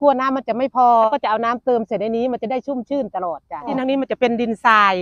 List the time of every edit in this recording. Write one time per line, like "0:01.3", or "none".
0:01.1
0:03.7